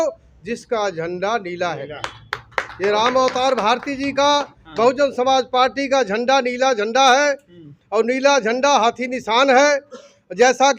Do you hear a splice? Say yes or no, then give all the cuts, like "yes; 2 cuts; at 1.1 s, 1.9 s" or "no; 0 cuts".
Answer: no; 0 cuts